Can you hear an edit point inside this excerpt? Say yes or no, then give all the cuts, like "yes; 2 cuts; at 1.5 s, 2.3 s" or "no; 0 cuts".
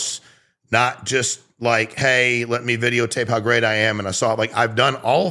no; 0 cuts